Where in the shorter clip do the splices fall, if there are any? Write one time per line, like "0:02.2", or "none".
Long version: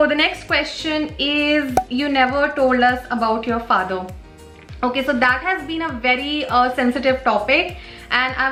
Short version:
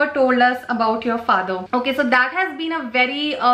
0:01.6

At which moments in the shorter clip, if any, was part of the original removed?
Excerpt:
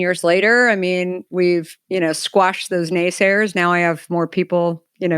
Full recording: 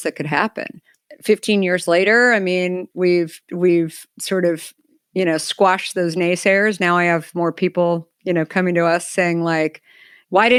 0:01.8

